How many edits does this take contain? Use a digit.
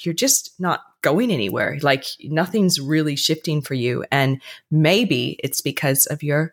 0